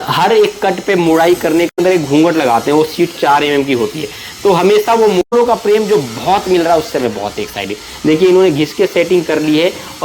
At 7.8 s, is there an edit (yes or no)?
no